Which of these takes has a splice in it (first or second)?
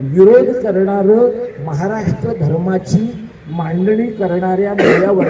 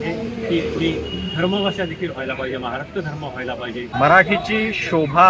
second